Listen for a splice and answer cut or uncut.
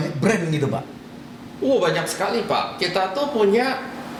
uncut